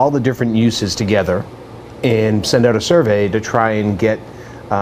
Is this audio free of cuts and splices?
yes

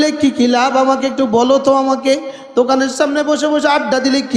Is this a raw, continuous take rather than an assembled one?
yes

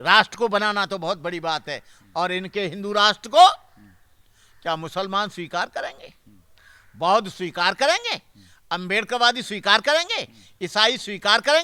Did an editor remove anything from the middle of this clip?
no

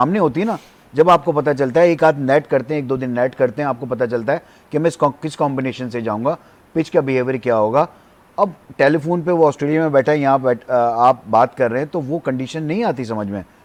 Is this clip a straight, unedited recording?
yes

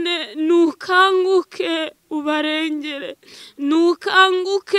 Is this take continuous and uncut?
yes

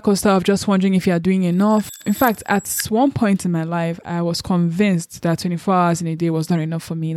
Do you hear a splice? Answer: yes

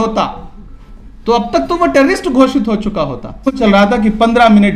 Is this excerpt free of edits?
no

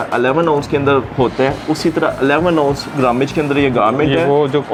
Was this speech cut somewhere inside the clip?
no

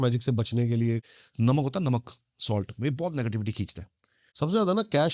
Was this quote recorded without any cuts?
no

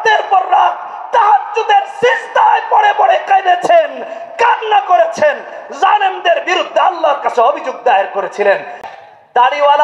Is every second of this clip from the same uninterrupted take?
no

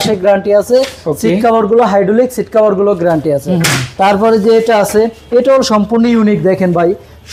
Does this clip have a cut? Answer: no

